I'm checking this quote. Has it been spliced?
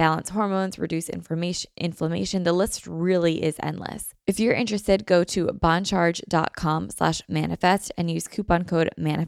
yes; 1 cut; at 4.1 s

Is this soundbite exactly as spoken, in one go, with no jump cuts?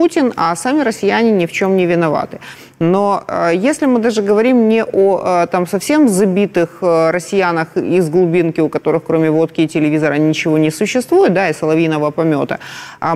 yes; 0 cuts

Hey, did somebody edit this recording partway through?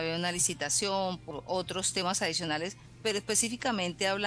yes; 2 cuts; at 1.2 s, 2.8 s

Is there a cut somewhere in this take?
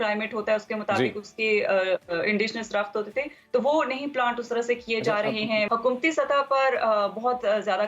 yes; 1 cut; at 5.7 s

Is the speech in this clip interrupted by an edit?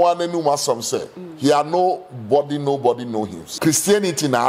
yes; 1 cut; at 3.4 s

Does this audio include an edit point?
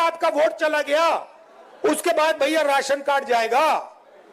no; 0 cuts

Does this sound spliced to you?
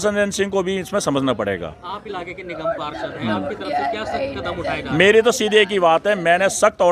no; 0 cuts

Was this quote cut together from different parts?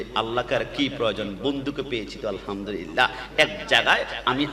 no; 0 cuts

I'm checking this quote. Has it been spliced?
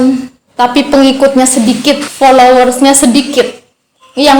yes; 1 cut; at 2.1 s

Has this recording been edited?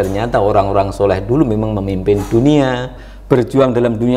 yes; 1 cut; at 3.0 s

